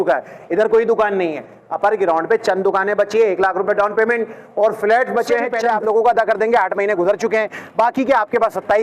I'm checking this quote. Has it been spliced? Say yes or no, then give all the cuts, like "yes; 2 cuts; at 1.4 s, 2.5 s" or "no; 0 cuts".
yes; 1 cut; at 5.5 s